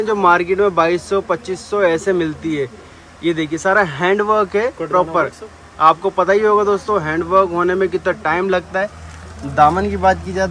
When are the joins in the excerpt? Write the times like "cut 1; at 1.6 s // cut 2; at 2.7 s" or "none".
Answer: none